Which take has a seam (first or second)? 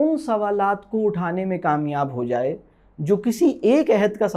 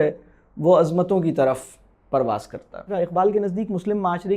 second